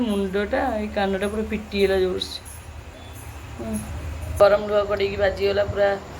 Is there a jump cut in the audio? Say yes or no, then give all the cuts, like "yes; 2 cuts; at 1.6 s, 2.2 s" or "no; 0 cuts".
yes; 1 cut; at 4.4 s